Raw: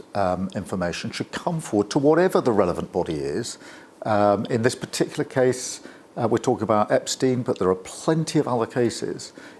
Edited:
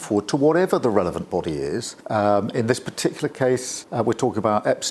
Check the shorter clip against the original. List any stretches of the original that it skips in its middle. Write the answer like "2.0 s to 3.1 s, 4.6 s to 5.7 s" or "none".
3.6 s to 3.9 s, 5.7 s to 6.0 s